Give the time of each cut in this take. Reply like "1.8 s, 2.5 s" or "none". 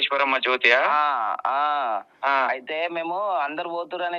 none